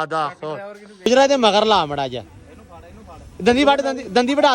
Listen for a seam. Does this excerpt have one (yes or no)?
yes